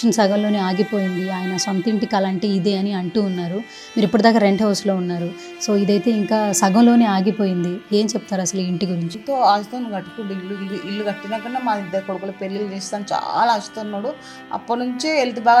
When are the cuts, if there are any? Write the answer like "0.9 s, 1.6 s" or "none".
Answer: 9.2 s